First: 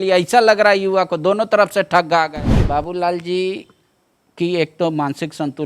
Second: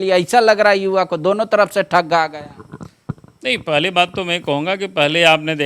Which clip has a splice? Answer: first; 1 cut; at 2.6 s

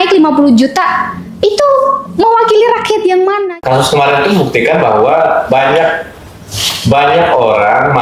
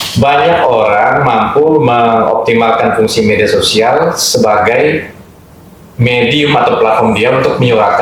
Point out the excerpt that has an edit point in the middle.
first; 1 cut; at 3.4 s

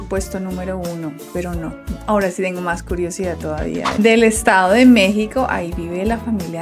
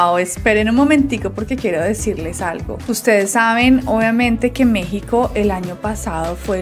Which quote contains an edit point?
first; 1 cut; at 3.9 s

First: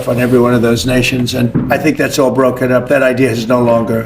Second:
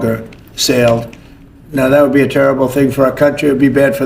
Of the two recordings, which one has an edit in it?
first; 1 cut; at 1.6 s

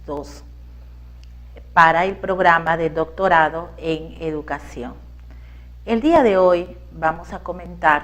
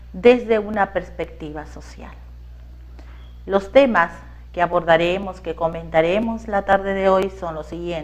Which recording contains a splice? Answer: first; 1 cut; at 3.6 s

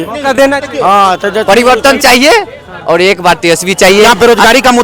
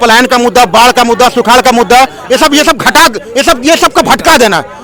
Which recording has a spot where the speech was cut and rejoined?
first; 2 cuts; at 1.4 s, 4.1 s

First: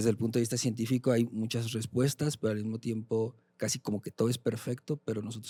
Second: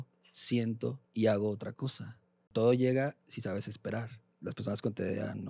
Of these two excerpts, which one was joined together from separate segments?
second; 3 cuts; at 1.0 s, 2.5 s, 4.2 s

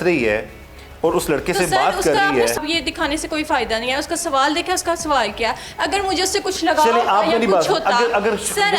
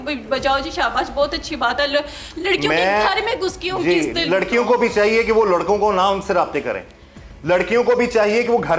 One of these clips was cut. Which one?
first; 1 cut; at 2.6 s

